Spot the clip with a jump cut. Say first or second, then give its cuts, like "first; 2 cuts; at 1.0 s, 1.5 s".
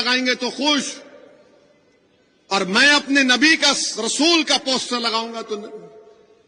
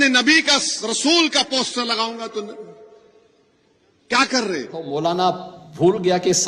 second; 1 cut; at 4.9 s